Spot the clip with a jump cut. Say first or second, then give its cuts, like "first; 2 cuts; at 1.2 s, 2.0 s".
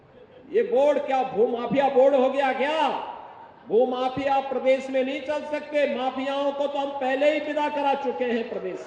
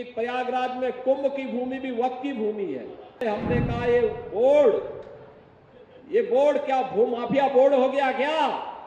second; 1 cut; at 3.2 s